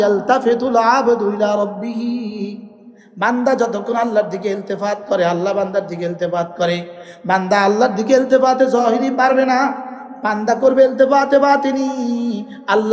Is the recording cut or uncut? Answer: uncut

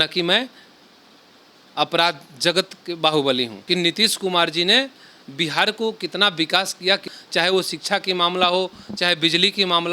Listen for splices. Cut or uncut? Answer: cut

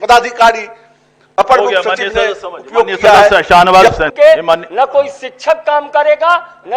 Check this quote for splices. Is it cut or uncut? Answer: cut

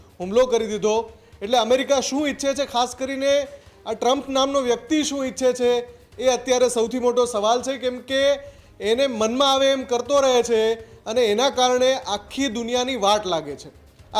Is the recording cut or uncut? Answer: uncut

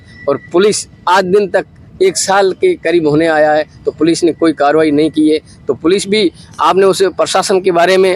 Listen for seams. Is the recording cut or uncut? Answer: uncut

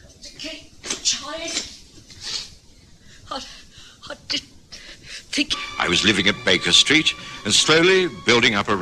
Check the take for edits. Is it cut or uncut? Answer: uncut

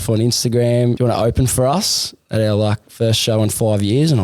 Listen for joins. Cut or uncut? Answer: cut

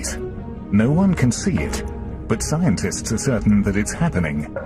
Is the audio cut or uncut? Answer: uncut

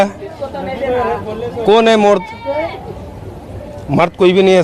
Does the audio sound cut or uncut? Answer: uncut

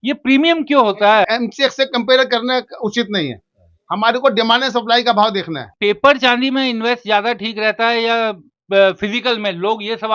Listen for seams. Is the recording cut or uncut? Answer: cut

